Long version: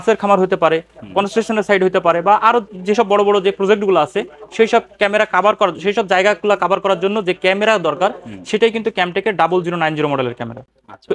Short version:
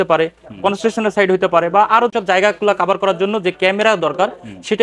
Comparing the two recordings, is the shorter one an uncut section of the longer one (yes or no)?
no